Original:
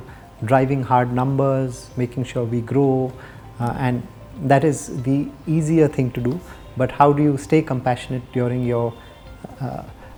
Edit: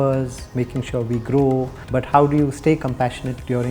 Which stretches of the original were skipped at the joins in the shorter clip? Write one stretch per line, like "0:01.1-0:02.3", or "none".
0:03.2-0:06.6